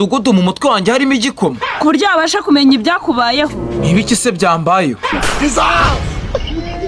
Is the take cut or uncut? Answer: uncut